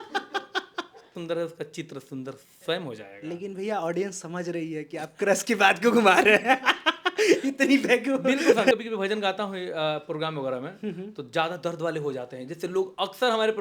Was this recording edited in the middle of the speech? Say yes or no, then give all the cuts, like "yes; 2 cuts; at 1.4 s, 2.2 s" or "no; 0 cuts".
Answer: yes; 2 cuts; at 1.2 s, 8.7 s